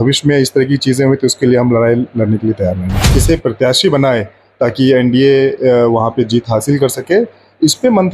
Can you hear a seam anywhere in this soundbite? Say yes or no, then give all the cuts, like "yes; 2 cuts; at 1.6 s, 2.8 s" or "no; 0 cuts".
yes; 1 cut; at 3.2 s